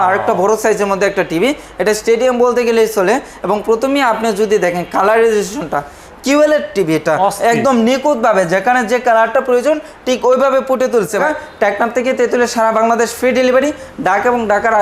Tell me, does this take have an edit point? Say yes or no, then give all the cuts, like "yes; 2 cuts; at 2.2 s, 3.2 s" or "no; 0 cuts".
yes; 1 cut; at 11.2 s